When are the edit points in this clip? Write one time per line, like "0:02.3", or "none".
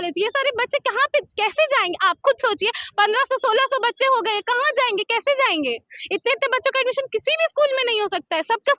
none